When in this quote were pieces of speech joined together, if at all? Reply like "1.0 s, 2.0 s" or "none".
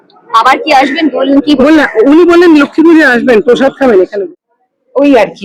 4.2 s